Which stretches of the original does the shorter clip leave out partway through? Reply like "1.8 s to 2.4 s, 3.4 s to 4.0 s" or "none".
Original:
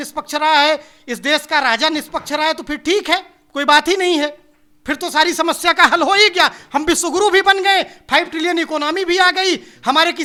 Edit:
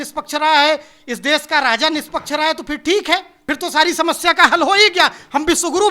3.4 s to 4.8 s